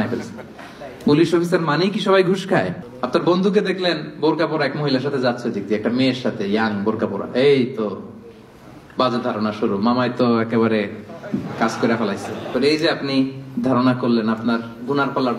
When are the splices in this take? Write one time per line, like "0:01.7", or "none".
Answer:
0:02.8
0:12.5